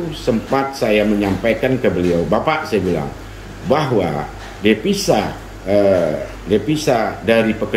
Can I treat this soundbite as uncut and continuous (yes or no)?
yes